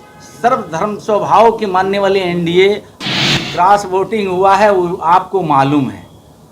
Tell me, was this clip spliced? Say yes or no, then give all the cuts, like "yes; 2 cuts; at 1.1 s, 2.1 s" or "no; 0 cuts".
yes; 1 cut; at 2.9 s